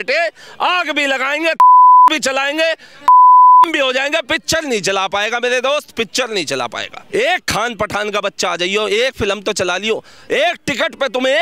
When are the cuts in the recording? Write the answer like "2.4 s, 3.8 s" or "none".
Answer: 6.9 s